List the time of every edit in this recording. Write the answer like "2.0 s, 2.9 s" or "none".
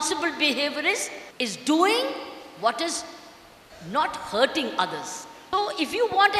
1.2 s, 5.3 s